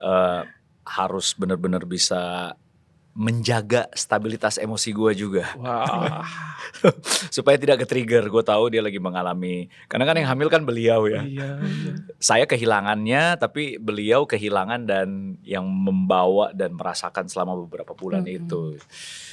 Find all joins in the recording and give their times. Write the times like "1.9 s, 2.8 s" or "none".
none